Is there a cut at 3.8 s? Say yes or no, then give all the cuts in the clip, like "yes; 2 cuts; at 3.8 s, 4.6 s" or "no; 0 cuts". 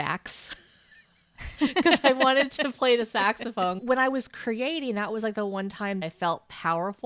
yes; 2 cuts; at 3.8 s, 6.0 s